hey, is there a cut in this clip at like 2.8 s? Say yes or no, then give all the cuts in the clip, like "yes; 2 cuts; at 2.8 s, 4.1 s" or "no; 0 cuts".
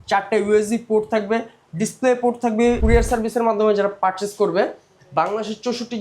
yes; 1 cut; at 2.8 s